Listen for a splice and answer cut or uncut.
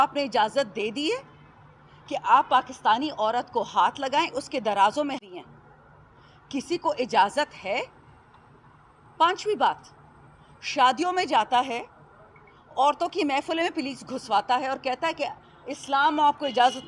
uncut